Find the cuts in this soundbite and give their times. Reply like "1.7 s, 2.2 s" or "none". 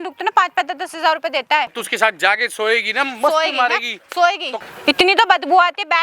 1.8 s, 4.6 s